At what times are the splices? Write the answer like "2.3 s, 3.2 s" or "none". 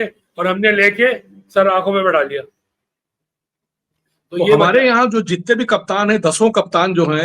4.6 s